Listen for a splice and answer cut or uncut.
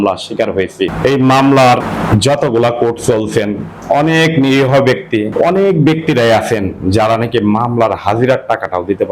cut